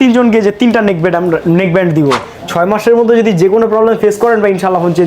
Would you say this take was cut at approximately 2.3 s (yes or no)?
yes